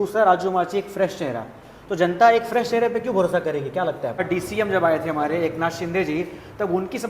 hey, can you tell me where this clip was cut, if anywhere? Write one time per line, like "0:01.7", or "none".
0:04.2